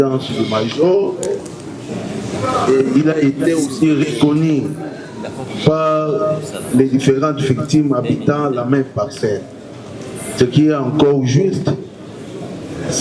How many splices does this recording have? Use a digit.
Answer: 0